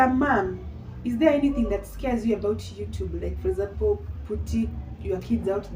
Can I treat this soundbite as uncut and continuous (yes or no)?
yes